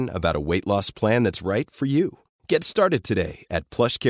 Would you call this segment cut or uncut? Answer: uncut